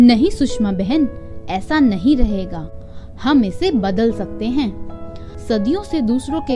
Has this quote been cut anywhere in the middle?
no; 0 cuts

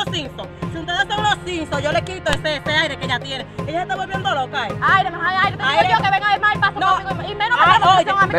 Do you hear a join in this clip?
no; 0 cuts

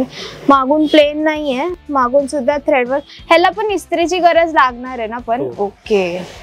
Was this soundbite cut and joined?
no; 0 cuts

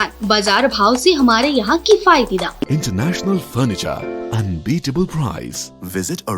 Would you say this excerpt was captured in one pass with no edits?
no; 1 cut; at 2.7 s

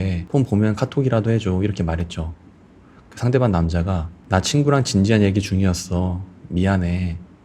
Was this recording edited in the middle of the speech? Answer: no; 0 cuts

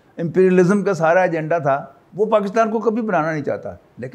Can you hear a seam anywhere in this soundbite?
yes; 1 cut; at 2.0 s

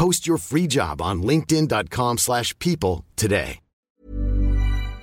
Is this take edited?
yes; 1 cut; at 4.0 s

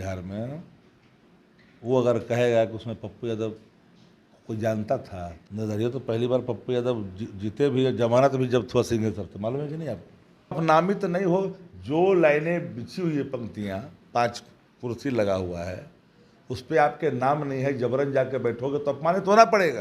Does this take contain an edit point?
yes; 2 cuts; at 5.4 s, 10.6 s

